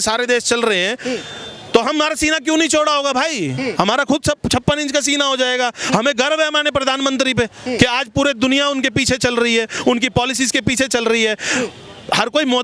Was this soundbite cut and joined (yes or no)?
no